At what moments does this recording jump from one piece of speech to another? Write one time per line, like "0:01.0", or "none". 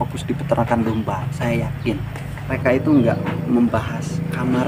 0:02.6